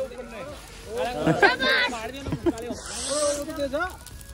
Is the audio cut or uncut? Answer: uncut